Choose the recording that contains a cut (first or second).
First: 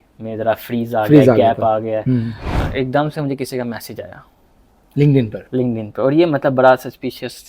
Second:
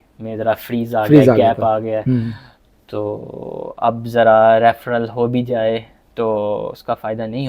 first